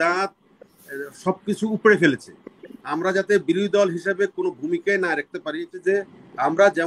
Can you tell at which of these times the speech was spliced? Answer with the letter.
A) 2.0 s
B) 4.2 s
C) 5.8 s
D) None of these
C